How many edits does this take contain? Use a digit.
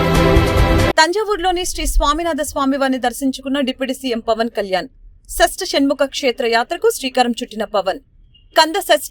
1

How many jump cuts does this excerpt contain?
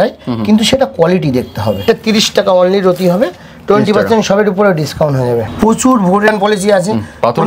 3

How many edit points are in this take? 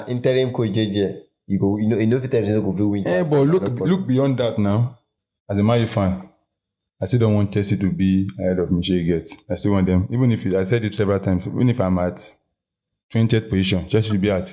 1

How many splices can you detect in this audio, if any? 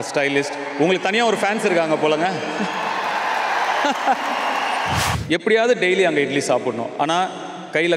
1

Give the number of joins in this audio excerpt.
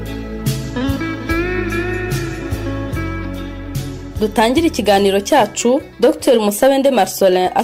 0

